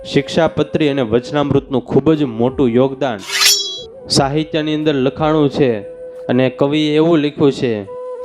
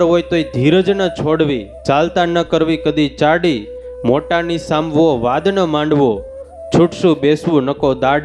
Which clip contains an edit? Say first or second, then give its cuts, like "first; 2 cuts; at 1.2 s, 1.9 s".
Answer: first; 1 cut; at 3.4 s